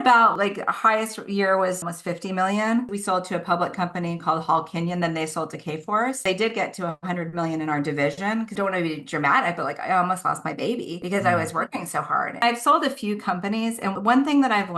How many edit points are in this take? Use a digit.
3